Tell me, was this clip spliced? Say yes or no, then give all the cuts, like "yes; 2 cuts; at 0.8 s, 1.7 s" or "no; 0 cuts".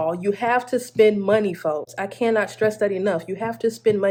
no; 0 cuts